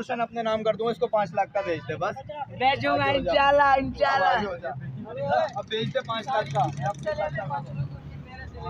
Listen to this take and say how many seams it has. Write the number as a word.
zero